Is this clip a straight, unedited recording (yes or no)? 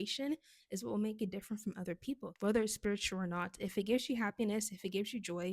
no